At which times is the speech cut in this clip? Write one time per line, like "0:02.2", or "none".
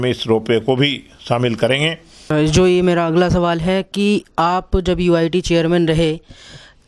0:02.3